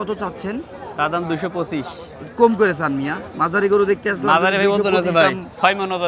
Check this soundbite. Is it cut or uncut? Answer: uncut